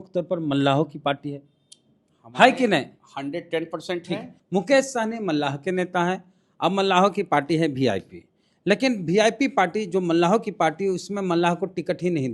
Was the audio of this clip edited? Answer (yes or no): yes